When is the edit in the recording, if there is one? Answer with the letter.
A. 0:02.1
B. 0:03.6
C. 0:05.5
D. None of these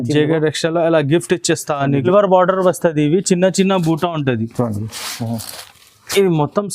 A